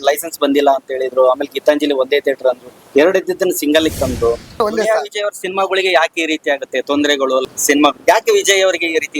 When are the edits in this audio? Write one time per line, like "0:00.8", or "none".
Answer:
0:04.5
0:07.4